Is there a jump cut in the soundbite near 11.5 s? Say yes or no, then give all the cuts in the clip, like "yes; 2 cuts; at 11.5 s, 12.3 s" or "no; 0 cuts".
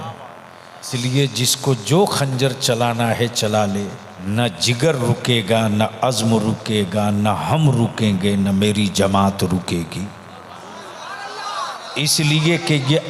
no; 2 cuts; at 0.9 s, 4.1 s